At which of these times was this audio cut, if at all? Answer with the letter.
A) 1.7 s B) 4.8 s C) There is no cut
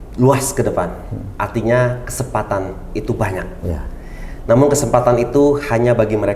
C